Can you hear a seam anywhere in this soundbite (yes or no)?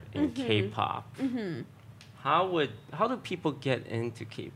no